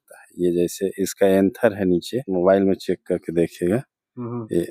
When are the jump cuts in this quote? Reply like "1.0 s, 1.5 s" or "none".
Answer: 2.2 s